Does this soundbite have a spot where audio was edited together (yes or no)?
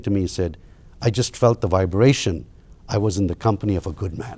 no